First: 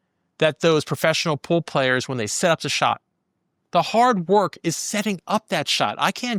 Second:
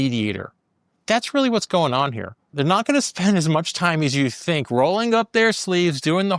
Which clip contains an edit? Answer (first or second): second